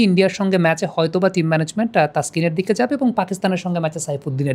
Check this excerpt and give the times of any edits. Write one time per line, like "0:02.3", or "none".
none